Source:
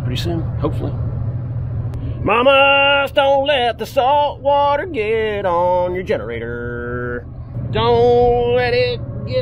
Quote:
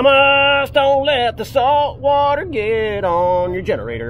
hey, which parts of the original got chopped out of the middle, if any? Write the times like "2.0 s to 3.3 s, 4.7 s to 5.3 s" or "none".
none